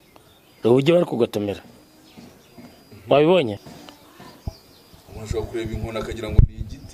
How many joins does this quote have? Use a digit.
1